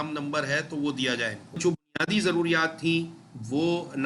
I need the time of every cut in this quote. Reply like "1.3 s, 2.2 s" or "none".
1.6 s